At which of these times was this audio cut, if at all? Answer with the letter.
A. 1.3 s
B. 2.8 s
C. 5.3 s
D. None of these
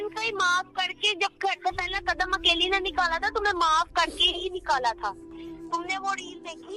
C